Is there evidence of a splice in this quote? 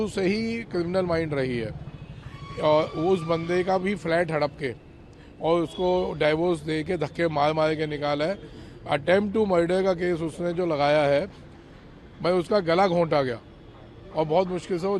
no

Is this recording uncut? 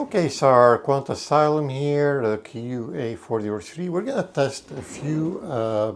yes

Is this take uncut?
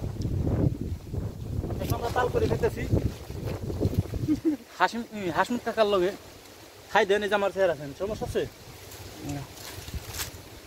yes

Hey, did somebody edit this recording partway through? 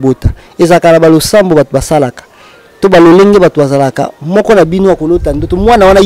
no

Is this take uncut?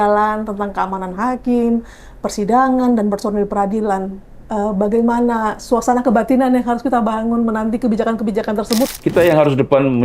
no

